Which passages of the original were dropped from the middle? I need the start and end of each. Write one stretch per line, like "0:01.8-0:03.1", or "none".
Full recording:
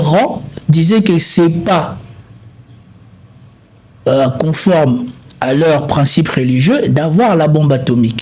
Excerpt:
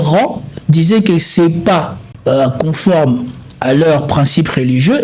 0:02.0-0:03.8